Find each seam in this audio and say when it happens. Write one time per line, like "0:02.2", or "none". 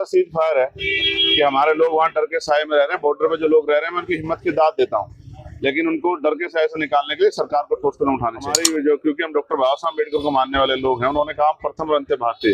0:08.5